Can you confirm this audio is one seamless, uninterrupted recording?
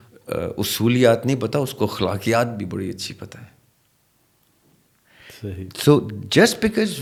yes; 0 cuts

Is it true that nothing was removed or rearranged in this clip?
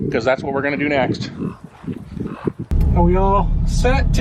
no; 1 cut; at 2.6 s

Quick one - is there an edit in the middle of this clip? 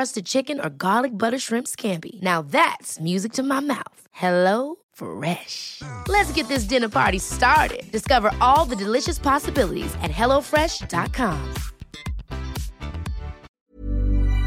yes; 1 cut; at 13.4 s

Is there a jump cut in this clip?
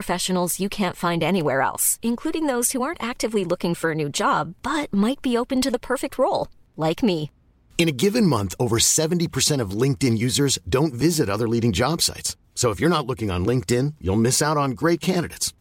no; 0 cuts

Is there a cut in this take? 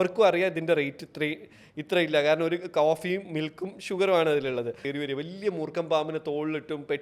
yes; 1 cut; at 4.8 s

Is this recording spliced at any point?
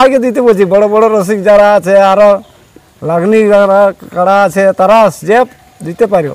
no; 0 cuts

